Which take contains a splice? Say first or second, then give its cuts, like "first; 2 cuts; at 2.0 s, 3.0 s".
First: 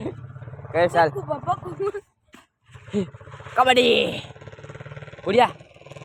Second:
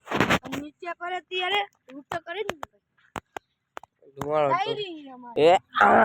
second; 2 cuts; at 4.2 s, 5.1 s